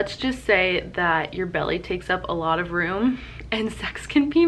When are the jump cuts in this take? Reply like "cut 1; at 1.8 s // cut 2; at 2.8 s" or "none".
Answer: none

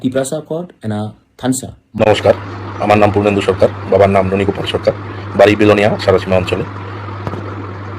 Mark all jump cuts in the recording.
cut 1; at 1.8 s

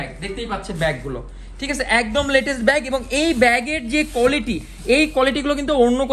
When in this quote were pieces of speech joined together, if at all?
none

